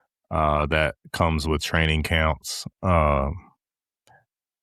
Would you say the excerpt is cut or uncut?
uncut